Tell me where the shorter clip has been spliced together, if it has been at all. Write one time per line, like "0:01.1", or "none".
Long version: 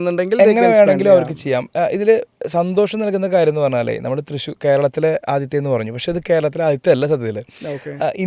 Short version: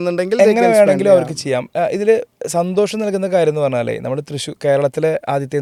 none